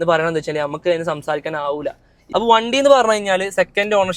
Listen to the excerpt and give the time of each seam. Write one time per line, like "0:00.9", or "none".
0:02.1